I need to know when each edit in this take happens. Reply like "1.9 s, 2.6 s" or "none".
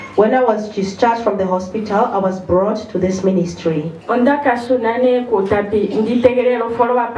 4.0 s